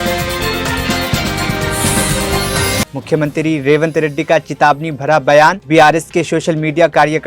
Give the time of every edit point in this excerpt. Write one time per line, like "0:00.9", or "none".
0:02.9